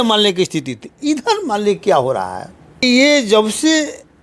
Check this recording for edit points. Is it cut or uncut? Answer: cut